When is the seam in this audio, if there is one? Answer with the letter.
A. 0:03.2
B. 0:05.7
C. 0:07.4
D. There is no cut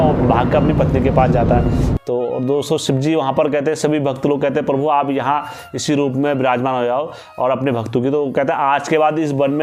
D